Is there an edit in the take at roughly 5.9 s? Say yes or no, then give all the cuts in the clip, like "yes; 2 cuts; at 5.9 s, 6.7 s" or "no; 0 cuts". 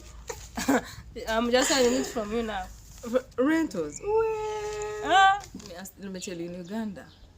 yes; 1 cut; at 5.9 s